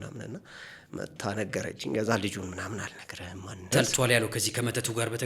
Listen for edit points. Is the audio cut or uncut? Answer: cut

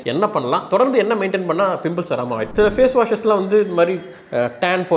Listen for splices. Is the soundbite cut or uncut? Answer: cut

